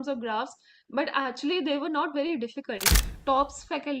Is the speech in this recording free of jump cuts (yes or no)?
no